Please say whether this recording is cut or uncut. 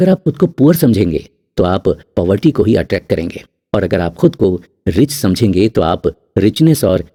uncut